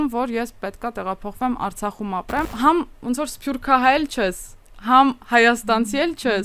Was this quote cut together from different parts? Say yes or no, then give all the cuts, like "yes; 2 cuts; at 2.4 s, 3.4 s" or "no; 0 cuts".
yes; 1 cut; at 2.4 s